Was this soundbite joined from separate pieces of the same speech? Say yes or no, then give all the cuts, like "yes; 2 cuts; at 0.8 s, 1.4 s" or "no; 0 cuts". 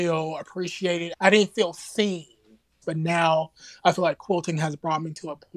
yes; 2 cuts; at 1.1 s, 2.8 s